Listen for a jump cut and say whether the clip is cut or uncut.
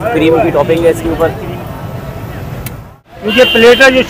cut